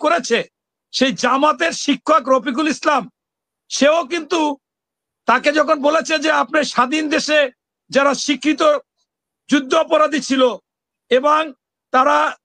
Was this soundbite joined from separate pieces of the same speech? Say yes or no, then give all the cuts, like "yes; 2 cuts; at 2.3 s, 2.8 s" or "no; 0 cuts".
no; 0 cuts